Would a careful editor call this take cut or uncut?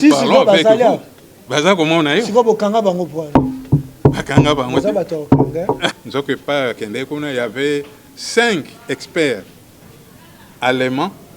cut